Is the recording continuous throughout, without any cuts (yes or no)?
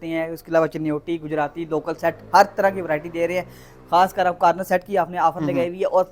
yes